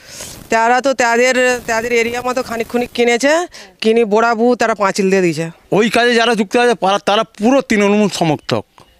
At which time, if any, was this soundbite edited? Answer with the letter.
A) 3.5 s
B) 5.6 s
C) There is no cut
B